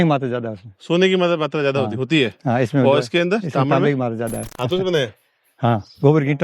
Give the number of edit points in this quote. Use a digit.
1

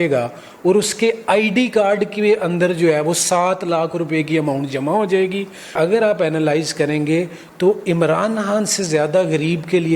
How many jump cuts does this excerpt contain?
1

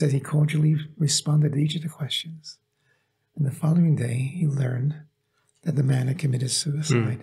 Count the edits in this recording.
0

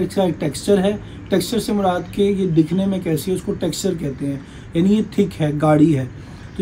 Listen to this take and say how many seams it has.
0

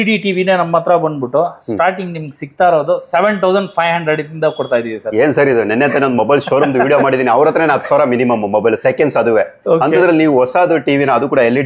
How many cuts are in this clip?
0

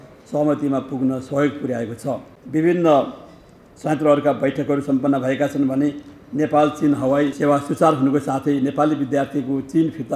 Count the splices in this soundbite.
2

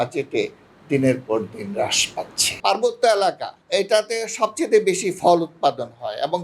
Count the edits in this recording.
1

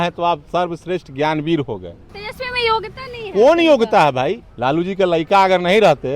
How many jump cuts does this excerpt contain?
2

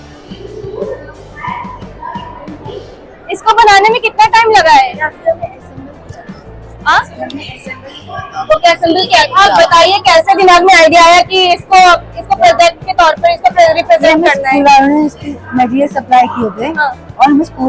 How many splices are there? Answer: 0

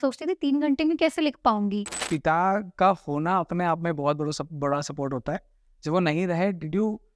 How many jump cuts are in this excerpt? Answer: 1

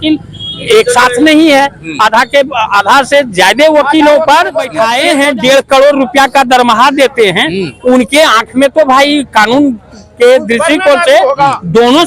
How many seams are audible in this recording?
1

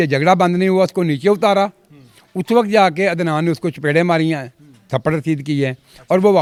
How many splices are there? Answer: 0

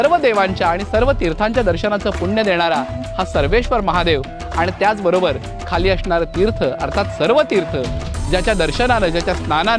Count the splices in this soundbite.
0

